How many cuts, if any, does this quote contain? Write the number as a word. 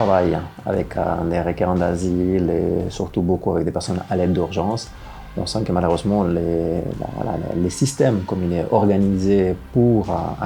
zero